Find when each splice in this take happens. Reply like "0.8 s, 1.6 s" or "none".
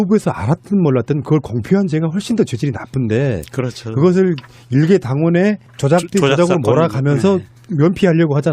1.4 s